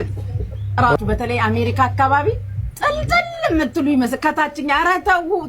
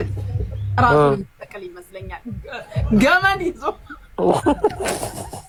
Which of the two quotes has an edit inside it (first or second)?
first